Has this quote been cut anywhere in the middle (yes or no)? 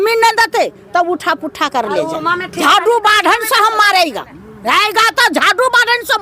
yes